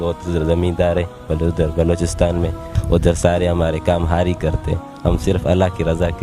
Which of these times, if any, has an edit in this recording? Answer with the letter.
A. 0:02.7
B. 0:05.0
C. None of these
A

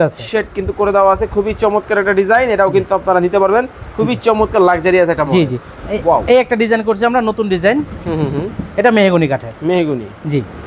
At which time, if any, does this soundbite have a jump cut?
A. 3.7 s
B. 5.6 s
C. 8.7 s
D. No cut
B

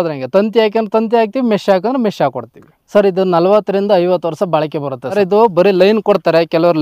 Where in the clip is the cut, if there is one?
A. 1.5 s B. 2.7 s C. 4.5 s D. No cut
D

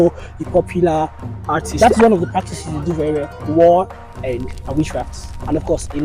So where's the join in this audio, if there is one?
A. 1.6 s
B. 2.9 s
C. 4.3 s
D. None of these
A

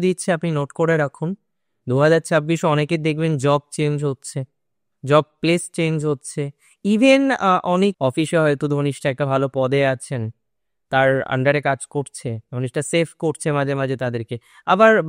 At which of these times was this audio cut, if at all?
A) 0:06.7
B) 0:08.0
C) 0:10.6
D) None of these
B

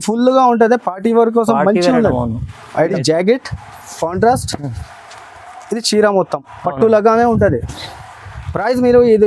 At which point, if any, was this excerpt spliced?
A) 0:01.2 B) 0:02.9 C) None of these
B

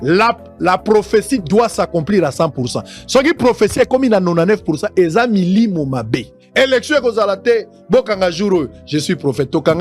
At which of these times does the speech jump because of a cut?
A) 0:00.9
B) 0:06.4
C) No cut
B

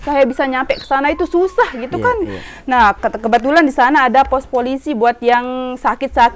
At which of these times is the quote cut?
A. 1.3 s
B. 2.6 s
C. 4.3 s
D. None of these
D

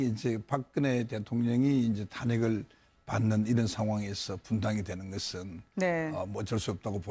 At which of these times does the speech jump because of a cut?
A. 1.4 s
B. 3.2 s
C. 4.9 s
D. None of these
B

